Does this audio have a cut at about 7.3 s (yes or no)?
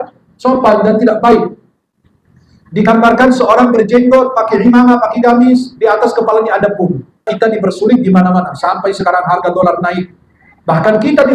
yes